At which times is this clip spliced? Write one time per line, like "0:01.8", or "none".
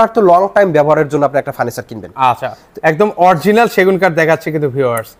none

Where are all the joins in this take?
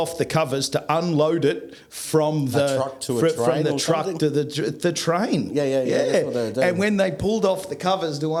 none

